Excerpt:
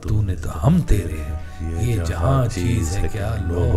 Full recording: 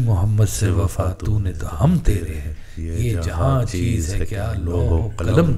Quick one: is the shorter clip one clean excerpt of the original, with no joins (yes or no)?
yes